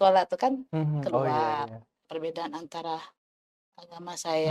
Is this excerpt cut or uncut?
cut